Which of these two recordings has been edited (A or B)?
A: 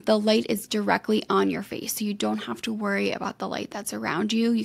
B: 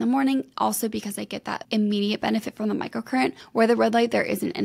B